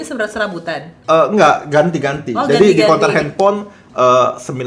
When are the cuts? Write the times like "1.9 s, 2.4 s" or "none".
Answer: 0.9 s